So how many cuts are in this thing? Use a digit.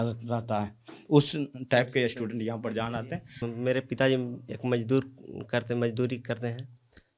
1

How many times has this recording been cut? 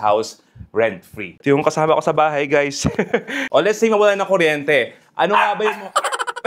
2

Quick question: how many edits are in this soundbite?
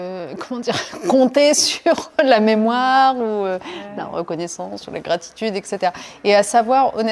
0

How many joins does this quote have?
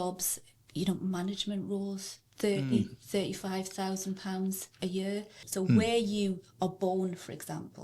1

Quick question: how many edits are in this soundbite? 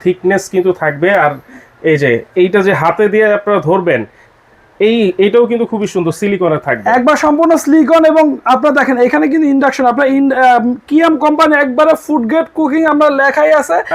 0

